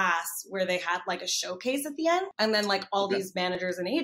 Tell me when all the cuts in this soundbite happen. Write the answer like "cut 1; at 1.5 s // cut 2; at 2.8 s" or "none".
cut 1; at 2.3 s